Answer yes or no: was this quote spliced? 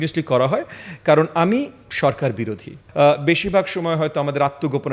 yes